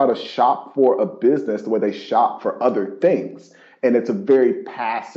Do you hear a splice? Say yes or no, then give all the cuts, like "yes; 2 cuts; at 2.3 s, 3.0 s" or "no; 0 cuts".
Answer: no; 0 cuts